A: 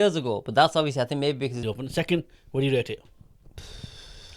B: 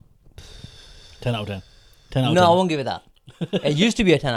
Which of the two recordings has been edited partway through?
A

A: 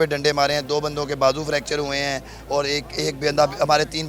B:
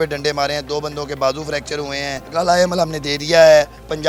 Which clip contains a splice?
B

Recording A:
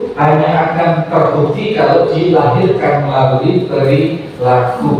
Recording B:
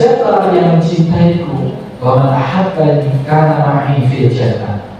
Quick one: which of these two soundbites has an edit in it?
B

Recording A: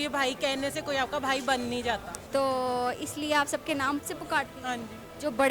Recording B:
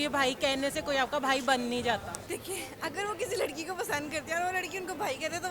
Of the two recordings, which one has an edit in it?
B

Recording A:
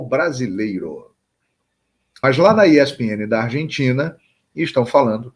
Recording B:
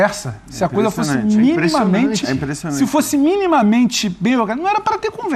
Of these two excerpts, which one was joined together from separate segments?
A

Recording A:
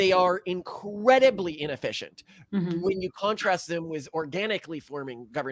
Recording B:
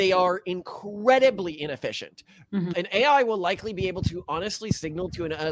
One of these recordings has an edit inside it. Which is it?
B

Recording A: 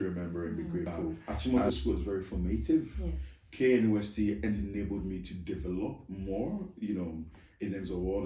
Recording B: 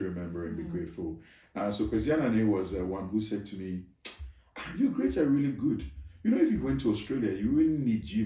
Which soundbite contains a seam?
A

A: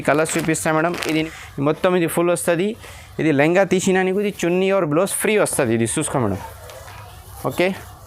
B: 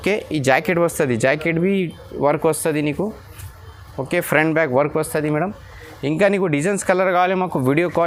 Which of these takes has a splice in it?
A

